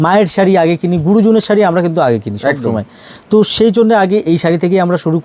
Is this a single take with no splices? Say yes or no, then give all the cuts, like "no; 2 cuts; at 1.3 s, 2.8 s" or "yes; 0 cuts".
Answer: yes; 0 cuts